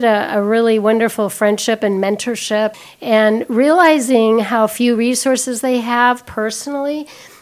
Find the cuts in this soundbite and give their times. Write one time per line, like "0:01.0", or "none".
0:02.8